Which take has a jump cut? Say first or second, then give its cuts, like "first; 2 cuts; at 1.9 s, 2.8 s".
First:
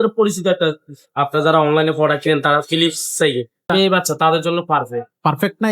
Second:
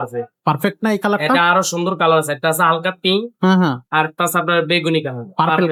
first; 1 cut; at 3.7 s